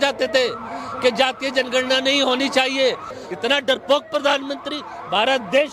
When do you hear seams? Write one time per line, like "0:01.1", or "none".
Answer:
0:03.2